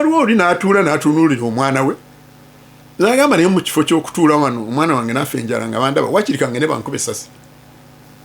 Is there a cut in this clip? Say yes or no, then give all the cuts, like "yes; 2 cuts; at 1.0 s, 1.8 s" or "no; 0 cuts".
no; 0 cuts